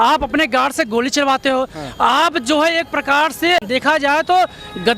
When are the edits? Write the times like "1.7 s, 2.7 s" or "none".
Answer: 3.6 s